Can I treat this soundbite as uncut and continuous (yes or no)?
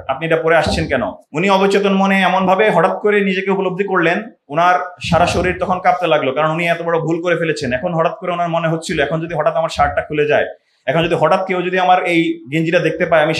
no